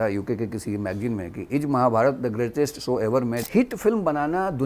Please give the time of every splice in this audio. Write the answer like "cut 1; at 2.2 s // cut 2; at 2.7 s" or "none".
cut 1; at 3.4 s

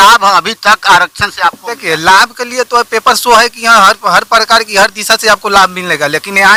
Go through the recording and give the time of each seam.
none

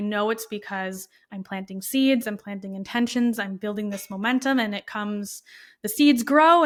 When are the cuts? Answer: none

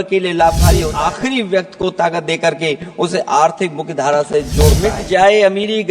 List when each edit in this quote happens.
cut 1; at 0.9 s // cut 2; at 4.9 s

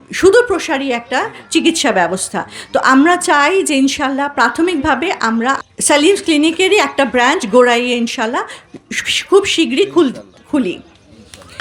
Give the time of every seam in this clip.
cut 1; at 5.6 s

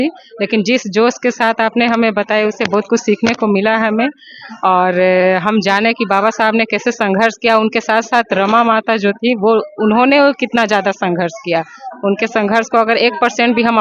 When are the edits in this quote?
none

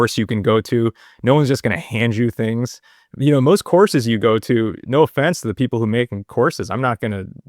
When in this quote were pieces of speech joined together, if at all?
none

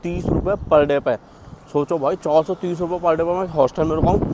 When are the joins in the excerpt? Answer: none

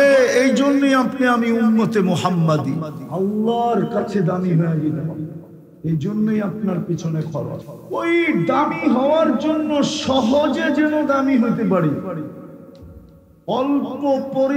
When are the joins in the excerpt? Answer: cut 1; at 3.0 s // cut 2; at 7.7 s

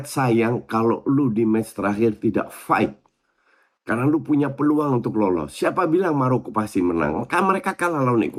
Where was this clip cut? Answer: none

